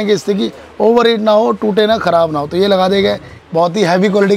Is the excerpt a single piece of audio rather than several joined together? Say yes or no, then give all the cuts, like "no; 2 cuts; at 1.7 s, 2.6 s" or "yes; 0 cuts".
no; 1 cut; at 3.3 s